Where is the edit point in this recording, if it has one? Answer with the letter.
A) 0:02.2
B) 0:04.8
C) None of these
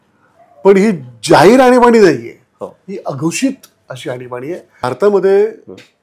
B